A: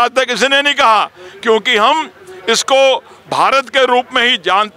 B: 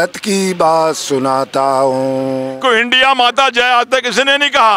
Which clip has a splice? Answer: B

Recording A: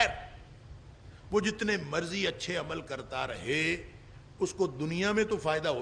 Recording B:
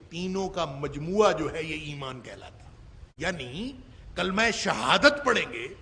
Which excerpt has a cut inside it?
B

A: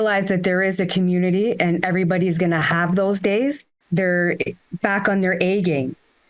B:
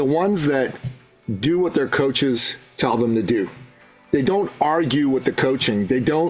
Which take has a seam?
A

